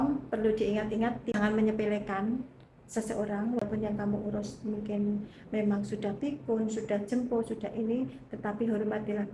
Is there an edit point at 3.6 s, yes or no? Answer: yes